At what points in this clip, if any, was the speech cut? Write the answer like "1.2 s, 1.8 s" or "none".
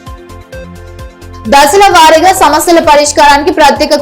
1.2 s

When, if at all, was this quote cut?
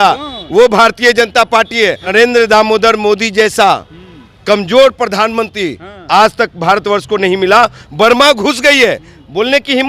2.0 s, 7.8 s

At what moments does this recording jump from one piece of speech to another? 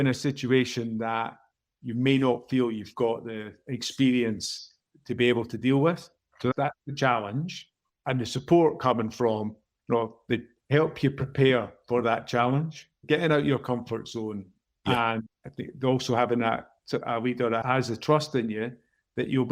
12.9 s, 17.0 s

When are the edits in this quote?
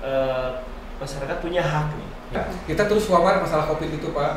2.4 s

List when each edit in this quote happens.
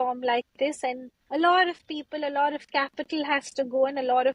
1.1 s

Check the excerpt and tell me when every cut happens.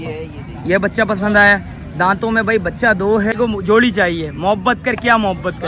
3.3 s

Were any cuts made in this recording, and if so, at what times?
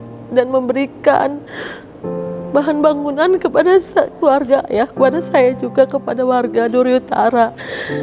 none

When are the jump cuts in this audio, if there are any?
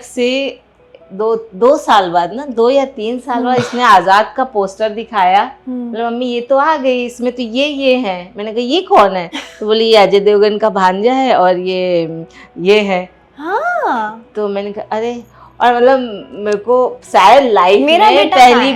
none

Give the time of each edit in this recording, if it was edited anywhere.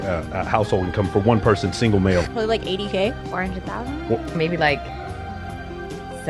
4.3 s

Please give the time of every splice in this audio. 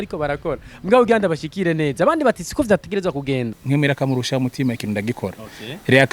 3.6 s

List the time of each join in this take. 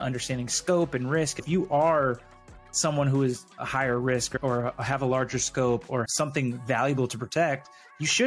1.4 s

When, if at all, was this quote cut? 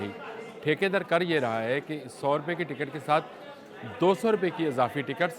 none

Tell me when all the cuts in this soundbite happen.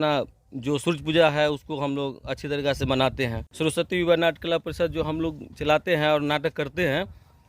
3.4 s

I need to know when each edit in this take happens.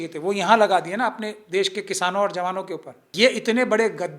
3.1 s

